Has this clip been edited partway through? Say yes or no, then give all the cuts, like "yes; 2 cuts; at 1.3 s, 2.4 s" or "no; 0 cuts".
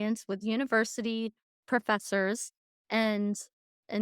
yes; 1 cut; at 1.5 s